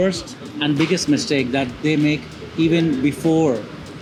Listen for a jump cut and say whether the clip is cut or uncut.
uncut